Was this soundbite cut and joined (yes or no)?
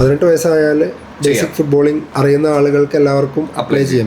yes